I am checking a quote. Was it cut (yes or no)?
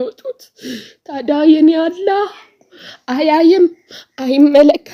no